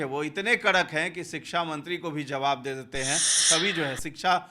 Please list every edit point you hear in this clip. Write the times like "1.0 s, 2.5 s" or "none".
3.4 s